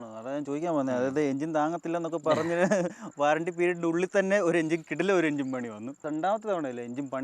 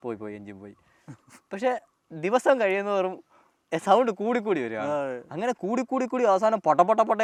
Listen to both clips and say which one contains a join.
first; 1 cut; at 6.0 s

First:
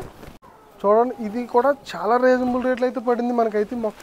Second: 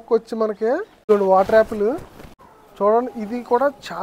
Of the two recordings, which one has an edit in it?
second; 1 cut; at 1.0 s

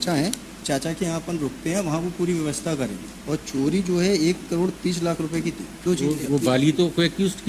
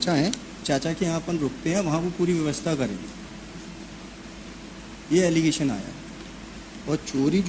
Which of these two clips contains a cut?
first; 2 cuts; at 3.1 s, 5.7 s

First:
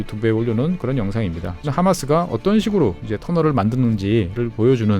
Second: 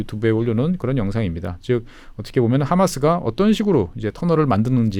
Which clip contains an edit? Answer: first; 1 cut; at 1.7 s

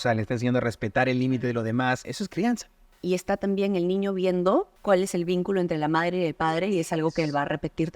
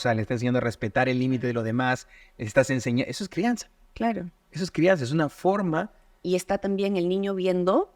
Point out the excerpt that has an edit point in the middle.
first; 2 cuts; at 2.5 s, 4.7 s

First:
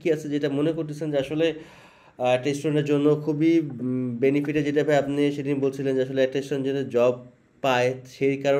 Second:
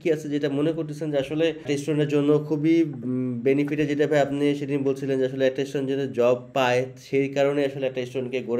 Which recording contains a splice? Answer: second; 2 cuts; at 1.6 s, 6.5 s

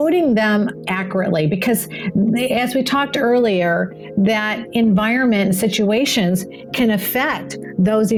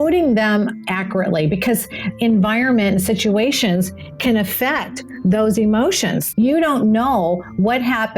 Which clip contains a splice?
second; 2 cuts; at 2.0 s, 6.2 s

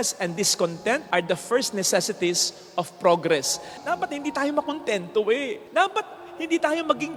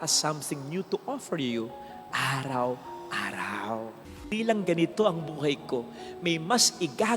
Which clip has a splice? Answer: second; 1 cut; at 4.1 s

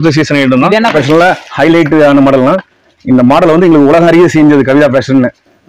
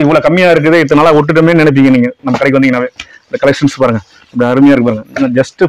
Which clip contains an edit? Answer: first; 1 cut; at 0.9 s

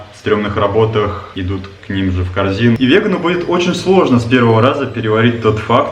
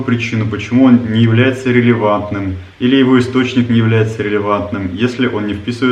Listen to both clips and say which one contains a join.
first; 2 cuts; at 1.2 s, 2.8 s

